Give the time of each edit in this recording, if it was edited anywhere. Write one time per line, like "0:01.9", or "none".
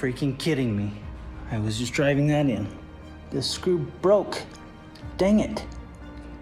none